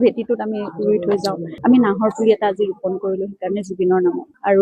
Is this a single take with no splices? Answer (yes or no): no